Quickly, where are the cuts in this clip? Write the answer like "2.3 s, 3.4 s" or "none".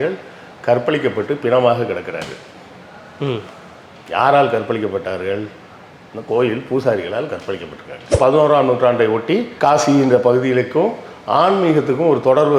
8.2 s